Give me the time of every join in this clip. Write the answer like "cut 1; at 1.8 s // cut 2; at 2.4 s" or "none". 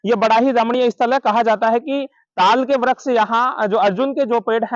none